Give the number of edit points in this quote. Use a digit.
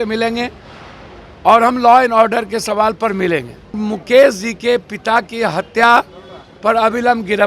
1